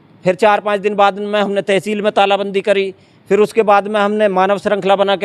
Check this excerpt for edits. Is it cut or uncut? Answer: uncut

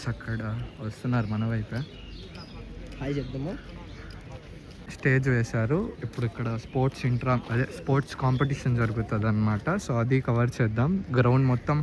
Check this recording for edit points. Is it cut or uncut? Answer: cut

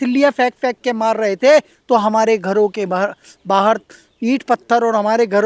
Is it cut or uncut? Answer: uncut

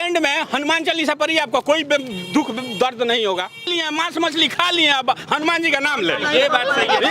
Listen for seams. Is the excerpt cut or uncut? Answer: cut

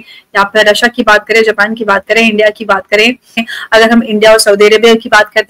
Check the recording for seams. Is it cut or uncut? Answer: cut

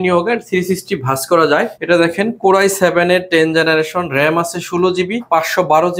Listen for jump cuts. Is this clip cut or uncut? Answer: cut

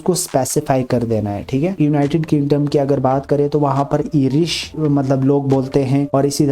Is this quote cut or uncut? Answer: cut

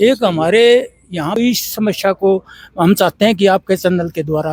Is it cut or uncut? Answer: cut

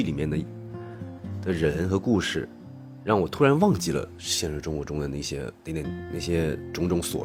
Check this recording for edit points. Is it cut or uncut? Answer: uncut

